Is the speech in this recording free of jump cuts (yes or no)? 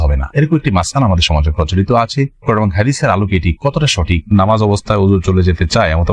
no